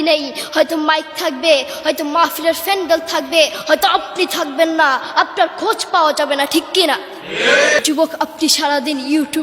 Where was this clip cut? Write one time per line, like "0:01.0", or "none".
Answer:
0:07.8